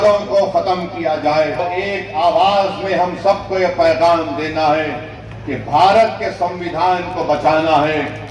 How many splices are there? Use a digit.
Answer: 1